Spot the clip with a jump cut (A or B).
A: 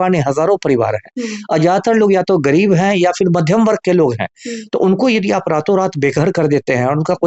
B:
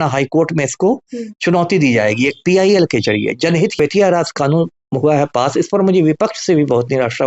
B